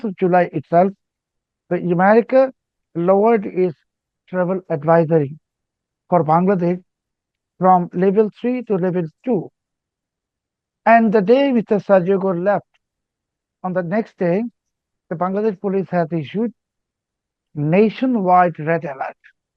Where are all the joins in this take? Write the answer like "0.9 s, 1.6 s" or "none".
none